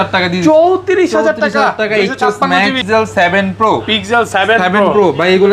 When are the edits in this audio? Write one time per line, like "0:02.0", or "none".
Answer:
0:02.8